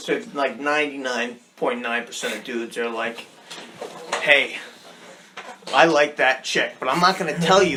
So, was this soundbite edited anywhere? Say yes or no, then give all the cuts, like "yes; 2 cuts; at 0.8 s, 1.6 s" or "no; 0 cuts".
no; 0 cuts